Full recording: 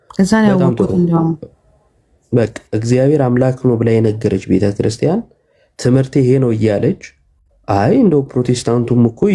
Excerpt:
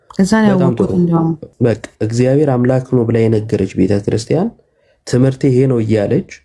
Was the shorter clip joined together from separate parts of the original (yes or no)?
yes